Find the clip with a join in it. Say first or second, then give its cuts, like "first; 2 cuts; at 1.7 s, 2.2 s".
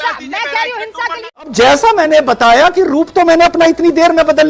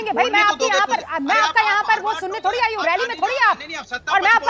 first; 1 cut; at 1.5 s